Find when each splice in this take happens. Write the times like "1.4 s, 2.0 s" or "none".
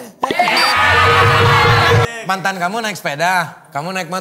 2.1 s